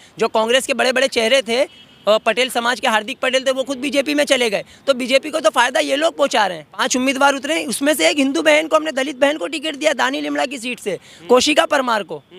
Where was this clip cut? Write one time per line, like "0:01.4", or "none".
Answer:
0:06.9